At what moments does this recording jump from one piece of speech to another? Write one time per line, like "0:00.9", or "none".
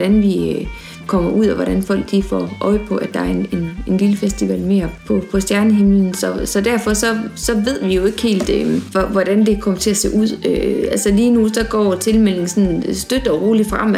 0:01.0
0:04.9